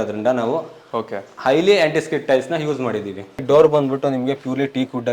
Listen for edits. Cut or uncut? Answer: cut